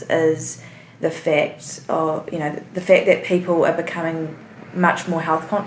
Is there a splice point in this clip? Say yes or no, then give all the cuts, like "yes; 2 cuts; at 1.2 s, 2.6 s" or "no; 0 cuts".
no; 0 cuts